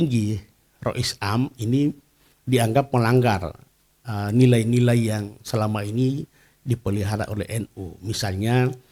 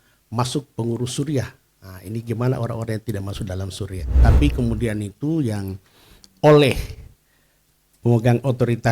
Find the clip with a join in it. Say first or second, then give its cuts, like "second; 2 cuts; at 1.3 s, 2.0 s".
second; 1 cut; at 4.2 s